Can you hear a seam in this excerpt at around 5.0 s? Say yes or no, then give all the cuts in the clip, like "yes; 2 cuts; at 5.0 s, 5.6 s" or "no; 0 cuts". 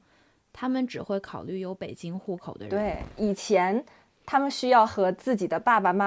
no; 1 cut; at 3.1 s